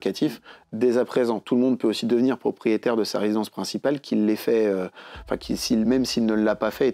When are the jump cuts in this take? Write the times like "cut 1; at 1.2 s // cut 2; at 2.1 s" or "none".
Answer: none